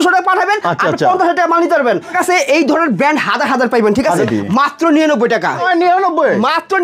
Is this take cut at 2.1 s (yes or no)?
yes